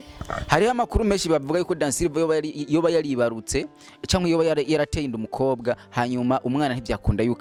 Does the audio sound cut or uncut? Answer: uncut